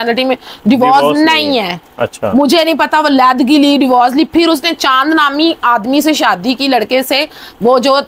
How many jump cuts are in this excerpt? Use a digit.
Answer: 0